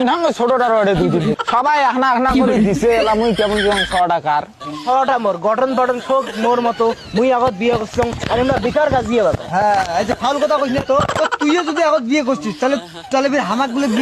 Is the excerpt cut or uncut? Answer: cut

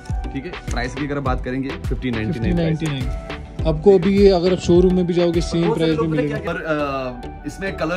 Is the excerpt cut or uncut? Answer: cut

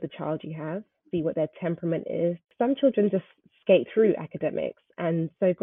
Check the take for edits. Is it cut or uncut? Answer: cut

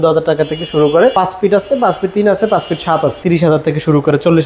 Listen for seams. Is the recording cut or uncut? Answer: cut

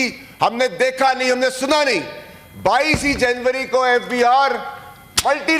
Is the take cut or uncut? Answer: uncut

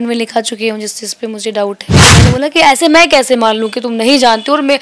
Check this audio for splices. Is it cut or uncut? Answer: cut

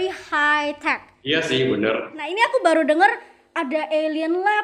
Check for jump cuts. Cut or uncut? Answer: cut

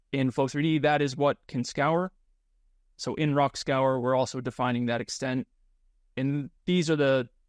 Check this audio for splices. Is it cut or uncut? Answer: uncut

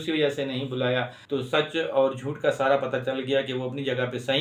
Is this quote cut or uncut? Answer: cut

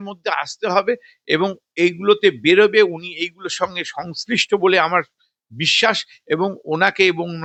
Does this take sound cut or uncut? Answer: uncut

